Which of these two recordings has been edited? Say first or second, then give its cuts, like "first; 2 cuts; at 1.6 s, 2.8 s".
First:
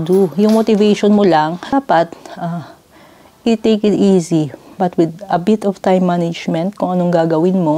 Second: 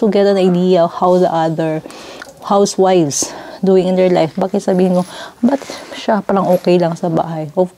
first; 1 cut; at 1.6 s